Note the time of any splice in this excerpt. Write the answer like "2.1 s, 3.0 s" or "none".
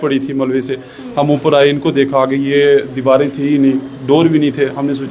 none